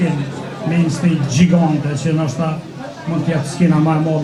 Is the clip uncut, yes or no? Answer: yes